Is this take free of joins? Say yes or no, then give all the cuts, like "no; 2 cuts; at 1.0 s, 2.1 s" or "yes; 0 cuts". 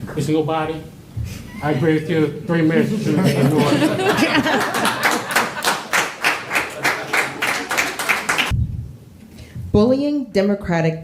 no; 1 cut; at 8.5 s